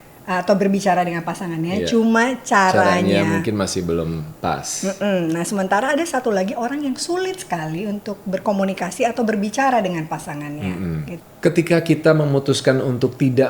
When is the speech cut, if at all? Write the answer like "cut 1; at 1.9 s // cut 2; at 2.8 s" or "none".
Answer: cut 1; at 11.2 s